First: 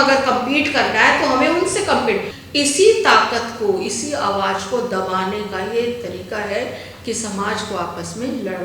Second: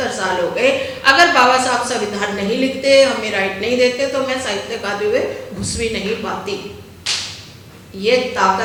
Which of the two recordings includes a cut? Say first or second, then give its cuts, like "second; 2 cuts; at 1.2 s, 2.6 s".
first; 1 cut; at 2.3 s